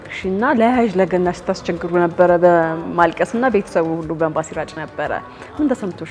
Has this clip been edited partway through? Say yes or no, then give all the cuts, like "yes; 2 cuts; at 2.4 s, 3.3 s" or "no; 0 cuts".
no; 0 cuts